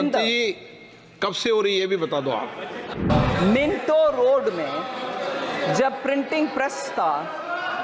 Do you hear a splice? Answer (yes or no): yes